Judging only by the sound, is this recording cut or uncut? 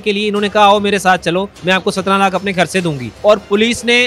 cut